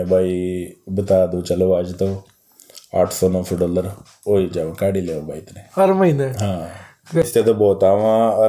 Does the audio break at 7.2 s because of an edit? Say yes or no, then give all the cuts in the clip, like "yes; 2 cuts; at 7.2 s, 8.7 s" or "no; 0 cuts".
yes; 1 cut; at 7.2 s